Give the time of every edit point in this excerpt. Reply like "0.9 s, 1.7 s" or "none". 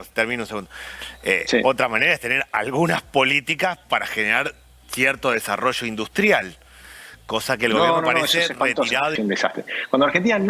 9.2 s